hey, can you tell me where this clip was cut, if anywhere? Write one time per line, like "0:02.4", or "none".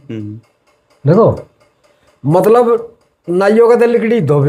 none